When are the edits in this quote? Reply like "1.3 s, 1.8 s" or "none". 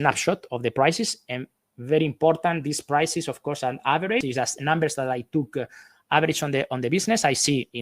4.2 s